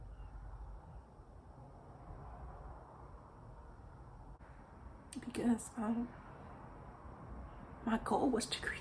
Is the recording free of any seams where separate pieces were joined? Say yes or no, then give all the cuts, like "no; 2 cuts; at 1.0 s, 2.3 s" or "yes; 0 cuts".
yes; 0 cuts